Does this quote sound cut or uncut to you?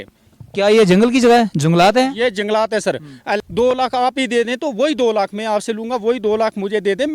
cut